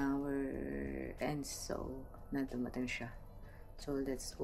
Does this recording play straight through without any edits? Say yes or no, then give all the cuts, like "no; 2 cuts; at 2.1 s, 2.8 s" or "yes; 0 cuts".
yes; 0 cuts